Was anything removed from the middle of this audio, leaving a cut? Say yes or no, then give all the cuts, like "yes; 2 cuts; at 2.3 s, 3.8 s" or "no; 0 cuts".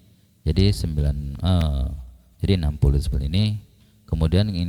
no; 0 cuts